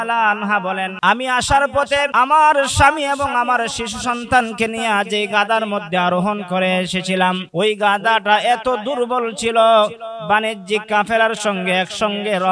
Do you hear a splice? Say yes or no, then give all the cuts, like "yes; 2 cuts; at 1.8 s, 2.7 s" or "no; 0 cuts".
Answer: yes; 3 cuts; at 0.9 s, 2.1 s, 7.4 s